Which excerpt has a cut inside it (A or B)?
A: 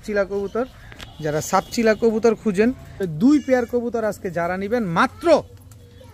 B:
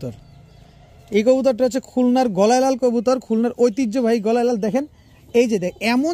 A